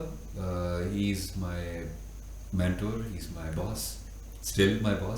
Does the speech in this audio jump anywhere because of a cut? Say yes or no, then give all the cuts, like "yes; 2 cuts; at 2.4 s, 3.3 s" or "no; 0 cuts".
no; 0 cuts